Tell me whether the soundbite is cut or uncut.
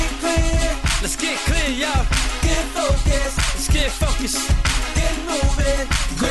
uncut